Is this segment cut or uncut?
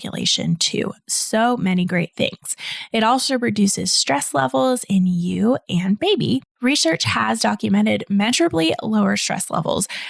cut